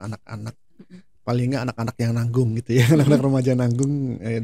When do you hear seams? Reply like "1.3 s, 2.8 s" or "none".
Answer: none